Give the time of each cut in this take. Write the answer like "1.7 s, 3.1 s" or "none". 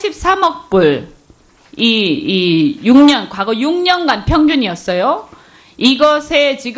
1.3 s